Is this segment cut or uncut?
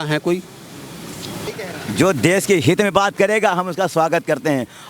cut